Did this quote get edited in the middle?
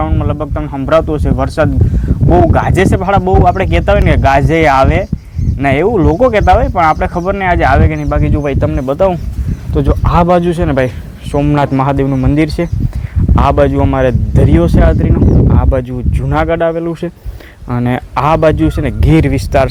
no; 0 cuts

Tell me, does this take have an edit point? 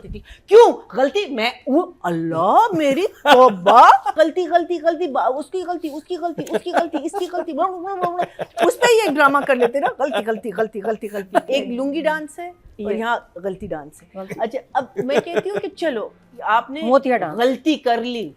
yes; 2 cuts; at 4.1 s, 11.5 s

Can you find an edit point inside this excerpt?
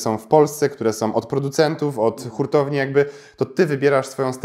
no; 0 cuts

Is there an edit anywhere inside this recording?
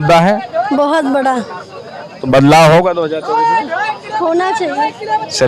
no; 0 cuts

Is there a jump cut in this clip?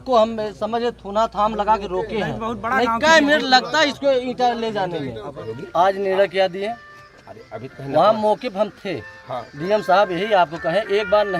yes; 1 cut; at 5.5 s

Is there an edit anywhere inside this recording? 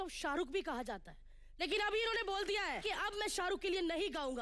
yes; 2 cuts; at 1.3 s, 2.8 s

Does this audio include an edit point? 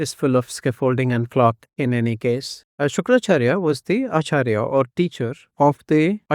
yes; 1 cut; at 2.6 s

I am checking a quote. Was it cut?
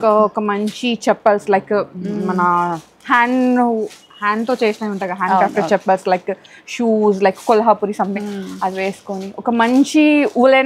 no; 0 cuts

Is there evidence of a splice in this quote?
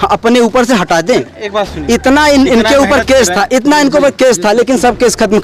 no; 0 cuts

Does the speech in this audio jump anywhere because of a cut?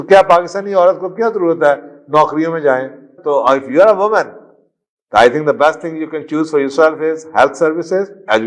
yes; 1 cut; at 3.2 s

